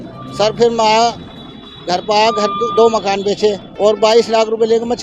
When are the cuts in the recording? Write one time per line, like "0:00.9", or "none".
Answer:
0:03.7